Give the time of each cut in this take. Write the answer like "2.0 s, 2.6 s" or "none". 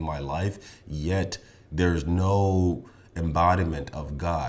none